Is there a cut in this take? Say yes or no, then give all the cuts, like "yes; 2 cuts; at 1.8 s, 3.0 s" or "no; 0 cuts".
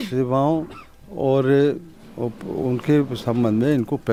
no; 0 cuts